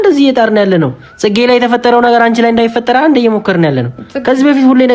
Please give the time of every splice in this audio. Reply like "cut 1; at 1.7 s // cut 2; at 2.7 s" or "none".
none